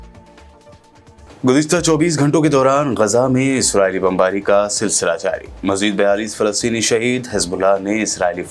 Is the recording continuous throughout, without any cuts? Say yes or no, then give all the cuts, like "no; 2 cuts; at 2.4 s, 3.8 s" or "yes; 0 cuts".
no; 1 cut; at 1.3 s